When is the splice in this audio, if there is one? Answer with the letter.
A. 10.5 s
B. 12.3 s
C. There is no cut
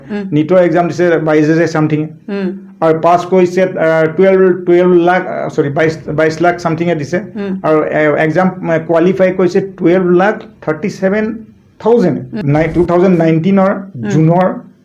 B